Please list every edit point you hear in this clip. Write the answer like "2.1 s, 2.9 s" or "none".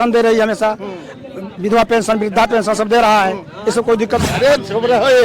4.3 s